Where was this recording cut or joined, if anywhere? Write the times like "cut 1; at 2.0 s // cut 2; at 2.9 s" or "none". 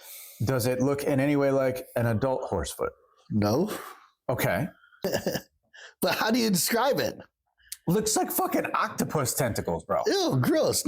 cut 1; at 5.0 s